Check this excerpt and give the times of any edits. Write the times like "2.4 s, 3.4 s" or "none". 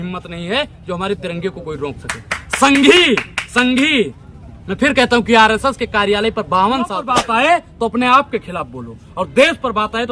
7.1 s